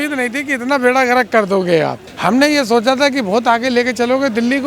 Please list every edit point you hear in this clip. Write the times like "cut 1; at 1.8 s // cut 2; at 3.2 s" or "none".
cut 1; at 2.1 s